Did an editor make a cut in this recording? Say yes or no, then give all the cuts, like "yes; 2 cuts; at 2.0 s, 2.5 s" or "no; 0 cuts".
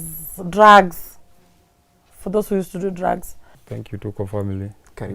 yes; 1 cut; at 3.6 s